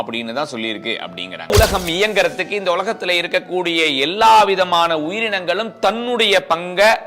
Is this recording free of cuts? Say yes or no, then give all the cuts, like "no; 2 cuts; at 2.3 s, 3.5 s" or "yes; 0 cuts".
no; 1 cut; at 1.5 s